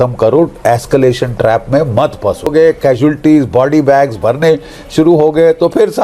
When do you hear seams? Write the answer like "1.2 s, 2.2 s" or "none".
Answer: 2.5 s